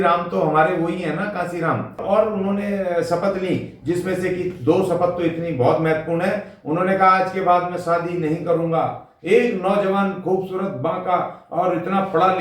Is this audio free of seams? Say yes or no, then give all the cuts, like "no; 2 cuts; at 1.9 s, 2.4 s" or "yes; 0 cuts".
no; 1 cut; at 2.0 s